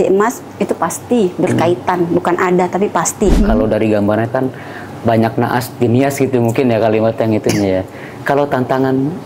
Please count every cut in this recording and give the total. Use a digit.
1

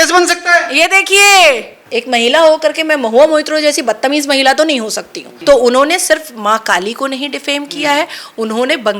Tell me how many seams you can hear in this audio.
2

